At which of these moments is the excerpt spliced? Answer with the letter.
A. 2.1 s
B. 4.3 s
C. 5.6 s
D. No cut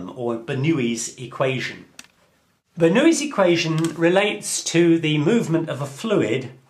D